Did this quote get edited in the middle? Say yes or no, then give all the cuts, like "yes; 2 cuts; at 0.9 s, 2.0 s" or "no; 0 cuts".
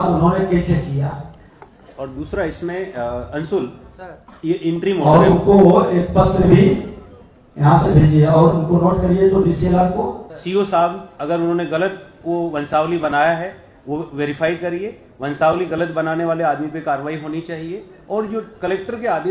yes; 1 cut; at 10.3 s